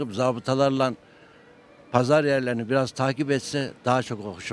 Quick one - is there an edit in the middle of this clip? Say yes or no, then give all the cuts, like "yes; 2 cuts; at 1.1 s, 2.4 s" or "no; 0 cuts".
no; 0 cuts